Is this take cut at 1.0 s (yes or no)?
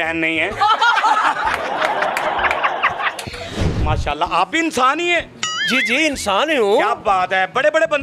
no